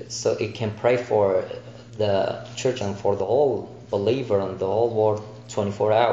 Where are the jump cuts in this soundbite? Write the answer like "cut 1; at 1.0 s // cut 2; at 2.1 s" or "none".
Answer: cut 1; at 2.8 s